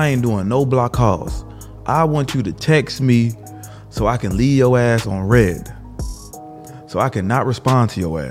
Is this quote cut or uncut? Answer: uncut